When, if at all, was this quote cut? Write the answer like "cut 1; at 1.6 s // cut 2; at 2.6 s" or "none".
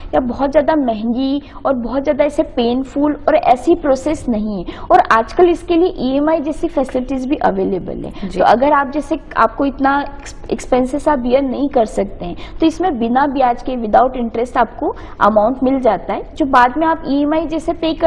none